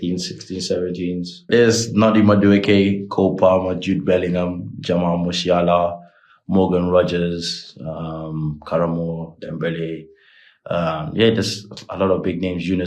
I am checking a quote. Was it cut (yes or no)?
yes